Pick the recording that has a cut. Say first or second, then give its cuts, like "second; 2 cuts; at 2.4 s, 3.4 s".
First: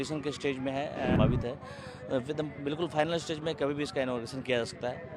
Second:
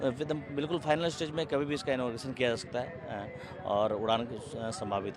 first; 1 cut; at 1.2 s